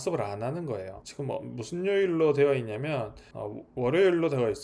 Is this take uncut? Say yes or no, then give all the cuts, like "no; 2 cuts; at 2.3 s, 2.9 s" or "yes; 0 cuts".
yes; 0 cuts